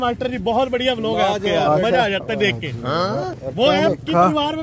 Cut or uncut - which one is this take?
uncut